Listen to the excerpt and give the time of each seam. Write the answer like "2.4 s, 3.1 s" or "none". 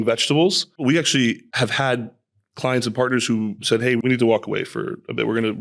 0.8 s, 1.5 s, 4.0 s